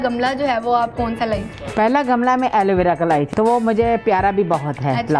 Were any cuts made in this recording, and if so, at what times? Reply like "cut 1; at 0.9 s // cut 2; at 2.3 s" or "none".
cut 1; at 1.6 s // cut 2; at 3.3 s